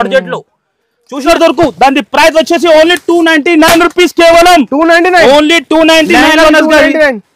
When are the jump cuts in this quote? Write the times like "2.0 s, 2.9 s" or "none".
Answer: 1.2 s